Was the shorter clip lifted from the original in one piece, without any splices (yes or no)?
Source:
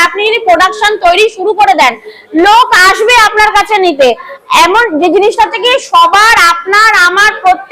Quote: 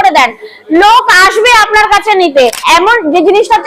no